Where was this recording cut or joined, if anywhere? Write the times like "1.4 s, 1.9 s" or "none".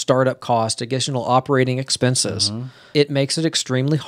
2.9 s

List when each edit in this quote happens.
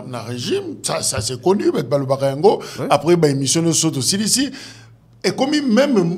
none

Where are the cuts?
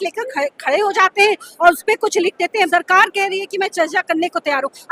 2.7 s

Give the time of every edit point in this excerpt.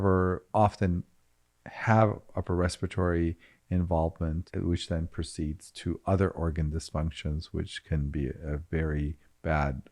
4.5 s

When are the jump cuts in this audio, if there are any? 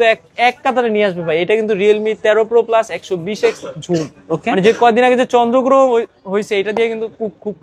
none

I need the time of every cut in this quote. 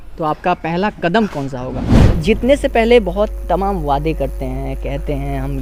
2.0 s

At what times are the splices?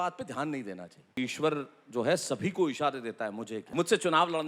1.2 s, 3.5 s

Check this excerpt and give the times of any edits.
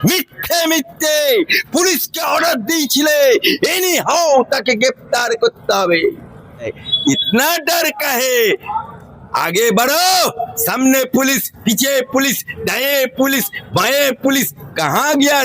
6.8 s

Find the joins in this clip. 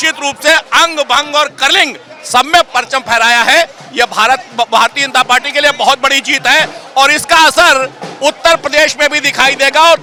none

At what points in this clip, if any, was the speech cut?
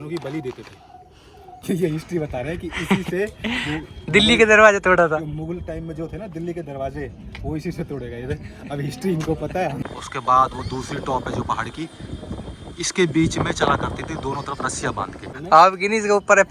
1.6 s, 9.8 s, 15.3 s

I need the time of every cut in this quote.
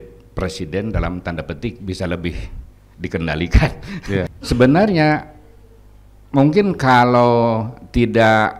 4.3 s

